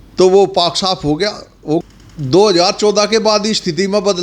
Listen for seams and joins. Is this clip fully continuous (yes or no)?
no